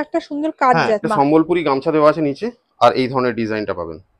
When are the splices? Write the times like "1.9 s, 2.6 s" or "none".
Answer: 1.0 s